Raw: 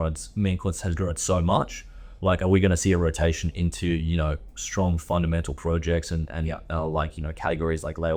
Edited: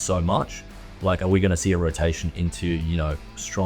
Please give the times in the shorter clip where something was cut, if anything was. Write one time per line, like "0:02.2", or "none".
none